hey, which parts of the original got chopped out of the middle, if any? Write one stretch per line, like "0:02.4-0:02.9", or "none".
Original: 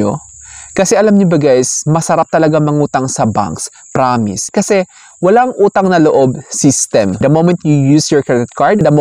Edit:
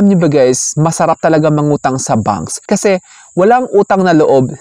0:03.6-0:04.4